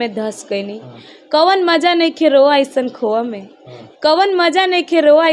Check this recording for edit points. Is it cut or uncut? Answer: uncut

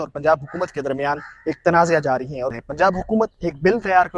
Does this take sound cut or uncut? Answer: cut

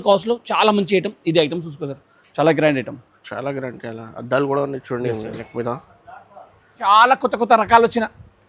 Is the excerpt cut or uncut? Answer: cut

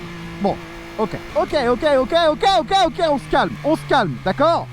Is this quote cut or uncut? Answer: cut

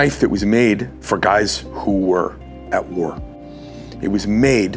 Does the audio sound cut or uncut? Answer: uncut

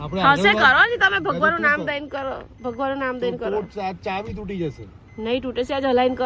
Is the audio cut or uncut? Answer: uncut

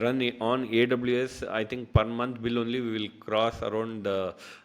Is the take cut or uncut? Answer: uncut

